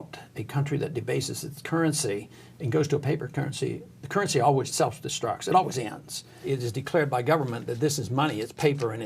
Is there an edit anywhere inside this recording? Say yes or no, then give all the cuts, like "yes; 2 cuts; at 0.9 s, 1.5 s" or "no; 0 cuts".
yes; 2 cuts; at 4.7 s, 6.4 s